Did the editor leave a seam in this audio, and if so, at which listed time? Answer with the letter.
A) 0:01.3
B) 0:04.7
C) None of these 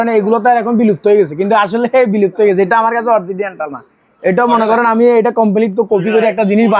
C